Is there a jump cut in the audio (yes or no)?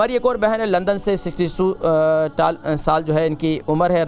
no